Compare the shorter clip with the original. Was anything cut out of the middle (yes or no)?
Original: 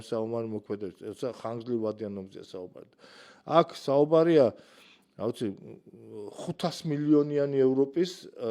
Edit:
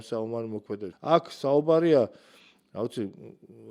yes